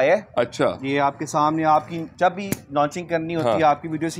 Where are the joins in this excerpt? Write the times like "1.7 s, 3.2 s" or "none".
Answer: none

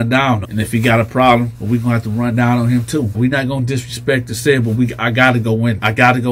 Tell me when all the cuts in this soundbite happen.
none

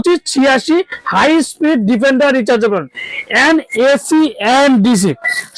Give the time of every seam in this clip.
none

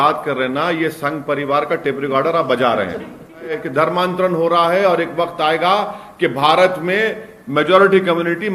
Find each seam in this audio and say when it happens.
3.6 s

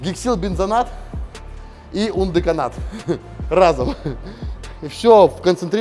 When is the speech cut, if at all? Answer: none

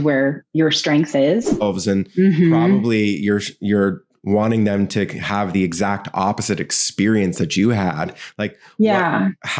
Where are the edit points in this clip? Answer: 1.6 s

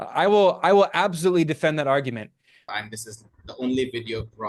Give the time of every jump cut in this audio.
2.7 s

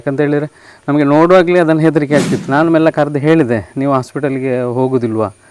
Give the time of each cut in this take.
2.4 s

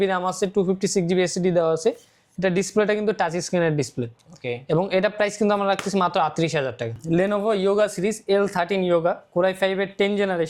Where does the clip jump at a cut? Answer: 6.9 s

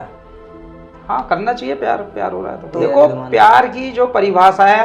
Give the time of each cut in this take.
2.8 s

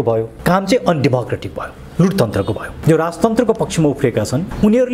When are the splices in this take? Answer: 2.7 s

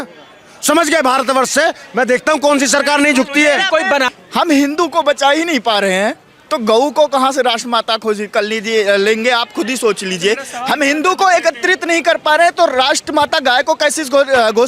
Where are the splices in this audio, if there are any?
4.1 s

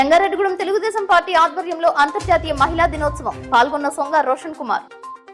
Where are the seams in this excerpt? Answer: none

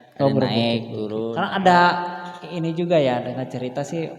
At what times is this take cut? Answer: 1.4 s

